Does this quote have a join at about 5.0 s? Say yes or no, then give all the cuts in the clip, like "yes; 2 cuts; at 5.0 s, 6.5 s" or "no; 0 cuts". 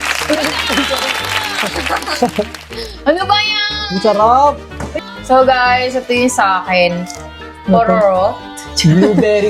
yes; 1 cut; at 5.0 s